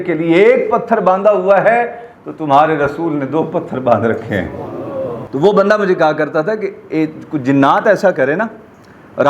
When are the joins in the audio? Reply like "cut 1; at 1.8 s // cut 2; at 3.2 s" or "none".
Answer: none